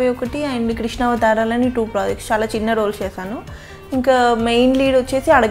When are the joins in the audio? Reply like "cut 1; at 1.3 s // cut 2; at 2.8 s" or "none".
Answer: none